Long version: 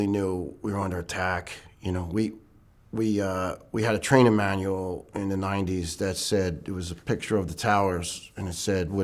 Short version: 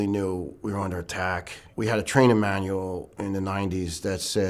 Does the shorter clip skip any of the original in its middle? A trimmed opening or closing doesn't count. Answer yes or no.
yes